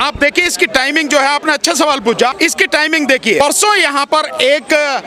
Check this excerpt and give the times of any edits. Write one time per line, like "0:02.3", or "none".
0:02.3
0:03.4